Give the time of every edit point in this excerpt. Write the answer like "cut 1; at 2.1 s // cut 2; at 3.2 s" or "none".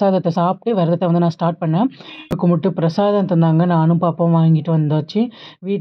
cut 1; at 2.3 s